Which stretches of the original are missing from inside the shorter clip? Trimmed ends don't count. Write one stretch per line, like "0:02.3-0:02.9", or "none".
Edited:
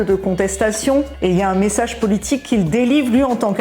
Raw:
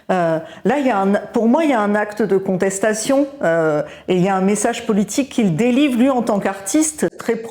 0:03.3-0:04.0